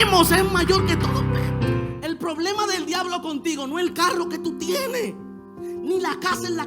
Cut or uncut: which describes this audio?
cut